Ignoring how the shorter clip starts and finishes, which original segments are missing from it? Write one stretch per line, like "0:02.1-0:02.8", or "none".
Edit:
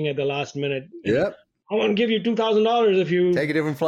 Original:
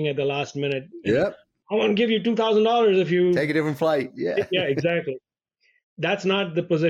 none